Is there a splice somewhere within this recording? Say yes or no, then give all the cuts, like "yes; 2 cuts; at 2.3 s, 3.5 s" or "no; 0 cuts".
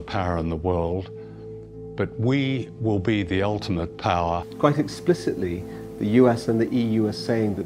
yes; 1 cut; at 2.3 s